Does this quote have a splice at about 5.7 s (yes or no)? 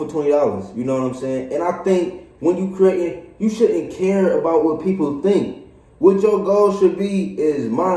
no